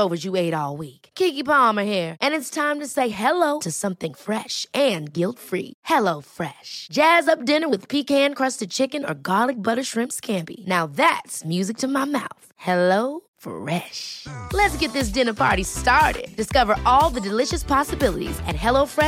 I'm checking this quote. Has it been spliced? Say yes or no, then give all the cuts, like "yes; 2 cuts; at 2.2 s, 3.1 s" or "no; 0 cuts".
no; 0 cuts